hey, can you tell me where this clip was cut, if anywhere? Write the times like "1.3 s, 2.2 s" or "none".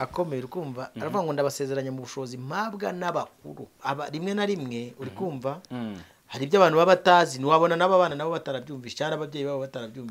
3.8 s